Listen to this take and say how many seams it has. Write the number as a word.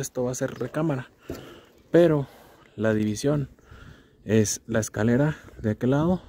zero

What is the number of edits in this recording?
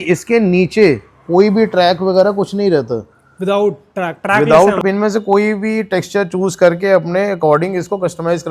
one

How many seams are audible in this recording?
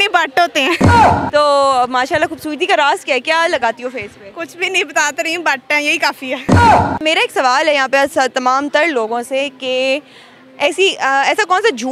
zero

